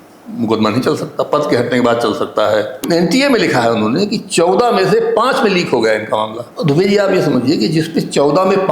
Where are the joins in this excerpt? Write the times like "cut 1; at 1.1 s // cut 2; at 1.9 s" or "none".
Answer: cut 1; at 2.8 s // cut 2; at 6.4 s